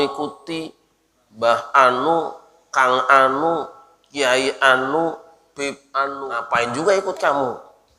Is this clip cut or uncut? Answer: cut